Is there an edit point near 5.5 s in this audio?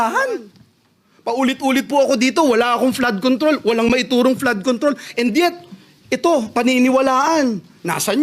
no; 1 cut; at 1.4 s

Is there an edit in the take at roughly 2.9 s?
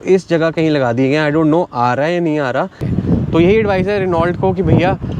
yes; 1 cut; at 2.9 s

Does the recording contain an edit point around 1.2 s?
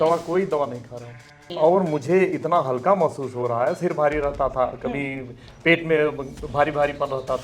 yes; 1 cut; at 1.2 s

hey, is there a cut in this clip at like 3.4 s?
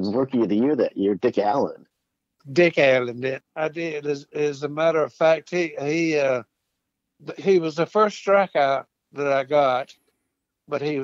yes; 2 cuts; at 2.4 s, 3.4 s

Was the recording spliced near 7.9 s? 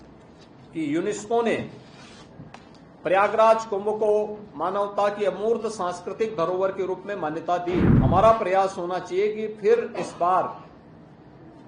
yes; 1 cut; at 7.9 s

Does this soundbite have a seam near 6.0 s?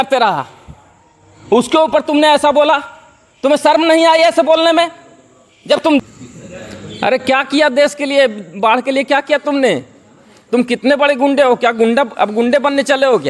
yes; 1 cut; at 6.0 s

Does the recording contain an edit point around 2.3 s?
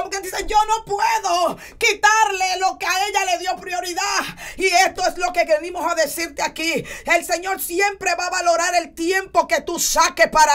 no; 0 cuts

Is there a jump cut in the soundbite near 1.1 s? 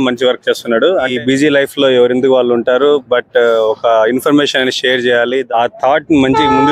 yes; 2 cuts; at 1.1 s, 5.4 s

